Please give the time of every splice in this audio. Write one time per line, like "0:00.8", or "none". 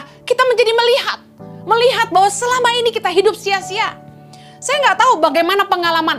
none